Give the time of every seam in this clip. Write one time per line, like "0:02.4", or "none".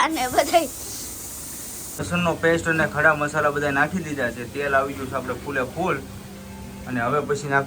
0:02.0